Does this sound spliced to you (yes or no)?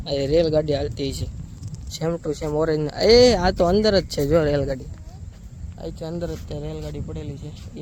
no